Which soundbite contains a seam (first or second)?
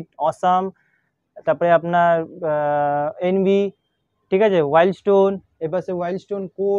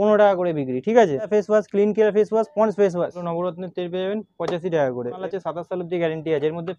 second